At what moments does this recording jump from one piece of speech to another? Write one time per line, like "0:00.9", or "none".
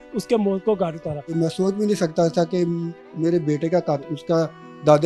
0:01.3
0:04.0